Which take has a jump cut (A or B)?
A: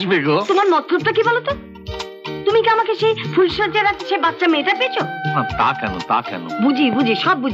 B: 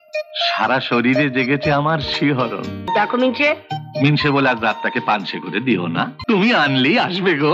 B